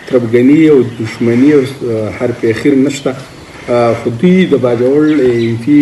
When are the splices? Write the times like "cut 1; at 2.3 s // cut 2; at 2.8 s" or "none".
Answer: none

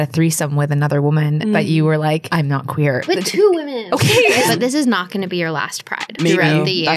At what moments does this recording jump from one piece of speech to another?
cut 1; at 3.1 s // cut 2; at 4.5 s // cut 3; at 6.1 s

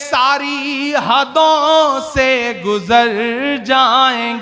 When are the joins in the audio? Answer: none

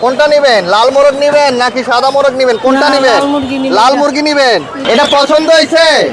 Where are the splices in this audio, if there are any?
cut 1; at 4.7 s

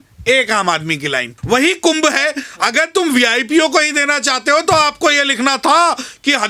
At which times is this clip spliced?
cut 1; at 1.3 s

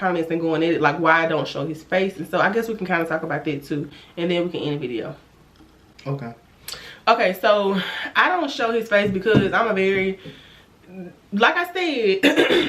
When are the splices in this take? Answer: none

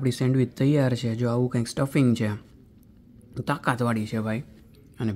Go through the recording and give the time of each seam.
none

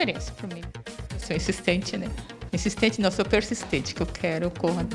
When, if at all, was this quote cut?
cut 1; at 1.1 s // cut 2; at 2.3 s

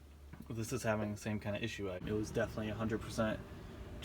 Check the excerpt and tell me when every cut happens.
cut 1; at 2.0 s

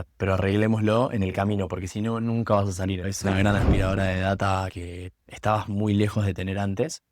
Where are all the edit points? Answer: cut 1; at 3.1 s

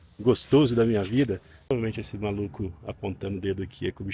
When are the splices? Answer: cut 1; at 1.7 s

